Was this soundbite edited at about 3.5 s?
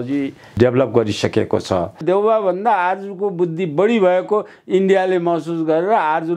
no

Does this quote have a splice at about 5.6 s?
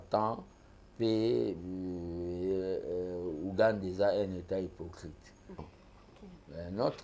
yes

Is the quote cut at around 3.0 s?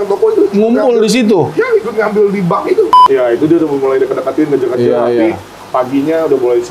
yes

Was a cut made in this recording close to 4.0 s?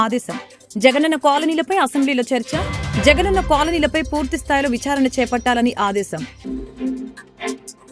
no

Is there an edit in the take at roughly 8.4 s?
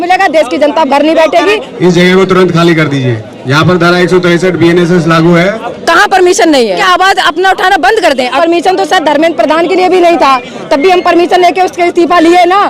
yes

